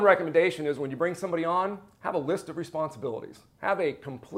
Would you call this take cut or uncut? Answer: uncut